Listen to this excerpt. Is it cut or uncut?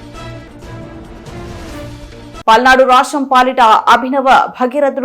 cut